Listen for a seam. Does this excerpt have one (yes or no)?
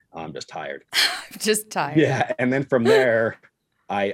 yes